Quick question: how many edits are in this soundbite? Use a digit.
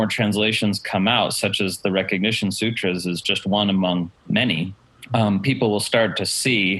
1